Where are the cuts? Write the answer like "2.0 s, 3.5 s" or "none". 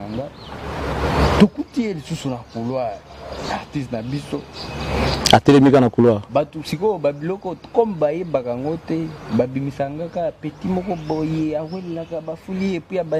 none